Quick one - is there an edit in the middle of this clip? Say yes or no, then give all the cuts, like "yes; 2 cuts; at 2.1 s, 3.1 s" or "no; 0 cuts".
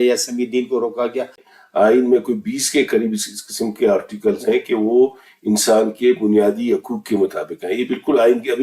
yes; 1 cut; at 1.5 s